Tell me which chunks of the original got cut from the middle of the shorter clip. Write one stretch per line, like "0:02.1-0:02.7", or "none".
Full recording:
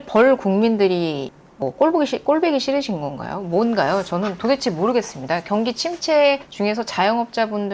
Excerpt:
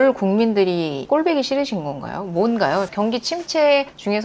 0:01.3-0:02.2
0:04.1-0:05.4